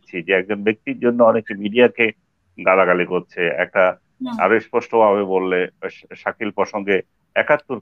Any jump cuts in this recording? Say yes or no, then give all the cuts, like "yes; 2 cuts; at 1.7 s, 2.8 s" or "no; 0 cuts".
no; 0 cuts